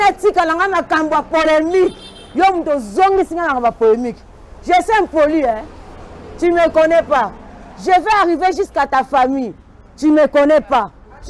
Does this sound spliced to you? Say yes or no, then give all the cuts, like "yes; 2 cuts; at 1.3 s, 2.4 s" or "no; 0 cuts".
no; 0 cuts